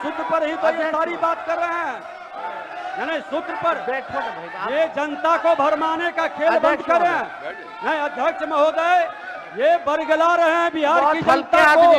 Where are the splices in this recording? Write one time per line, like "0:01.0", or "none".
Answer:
none